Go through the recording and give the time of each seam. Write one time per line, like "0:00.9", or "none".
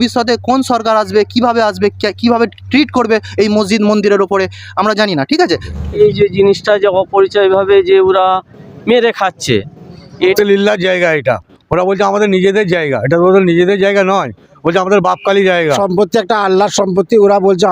0:05.7
0:10.3